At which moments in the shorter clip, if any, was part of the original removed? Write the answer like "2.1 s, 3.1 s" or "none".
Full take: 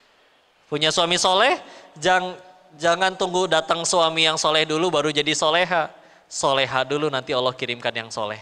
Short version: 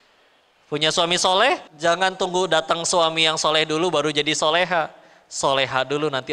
1.7 s